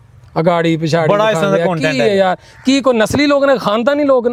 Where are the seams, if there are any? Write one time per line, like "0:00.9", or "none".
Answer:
none